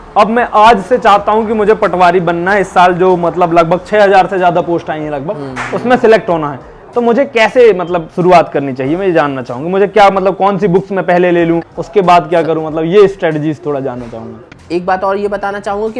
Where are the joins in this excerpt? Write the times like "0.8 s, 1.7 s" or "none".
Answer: 11.7 s, 14.5 s